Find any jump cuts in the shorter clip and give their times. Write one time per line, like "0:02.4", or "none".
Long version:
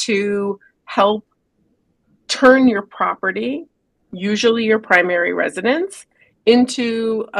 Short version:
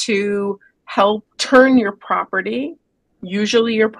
0:01.3